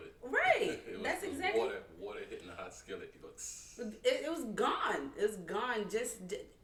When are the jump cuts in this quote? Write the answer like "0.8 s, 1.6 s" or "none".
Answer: none